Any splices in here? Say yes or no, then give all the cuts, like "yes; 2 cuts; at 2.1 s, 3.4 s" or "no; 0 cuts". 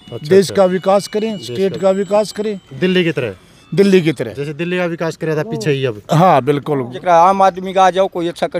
yes; 1 cut; at 7.0 s